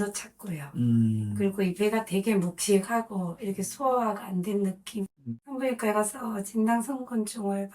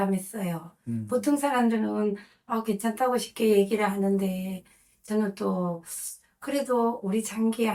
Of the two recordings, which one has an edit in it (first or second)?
first